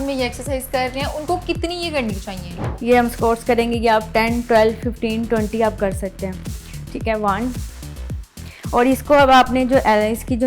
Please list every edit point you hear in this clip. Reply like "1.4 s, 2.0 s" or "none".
2.7 s